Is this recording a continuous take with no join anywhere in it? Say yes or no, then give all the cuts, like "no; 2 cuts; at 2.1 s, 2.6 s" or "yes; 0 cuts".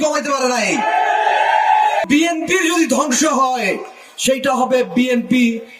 no; 1 cut; at 2.1 s